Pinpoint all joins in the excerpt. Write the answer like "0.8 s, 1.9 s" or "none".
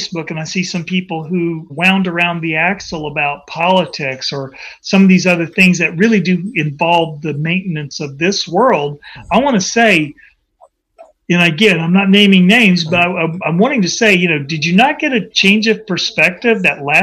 1.7 s